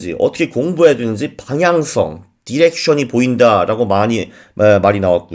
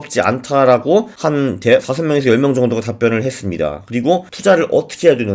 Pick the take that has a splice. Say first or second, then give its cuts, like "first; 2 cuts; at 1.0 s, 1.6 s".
second; 2 cuts; at 1.1 s, 4.3 s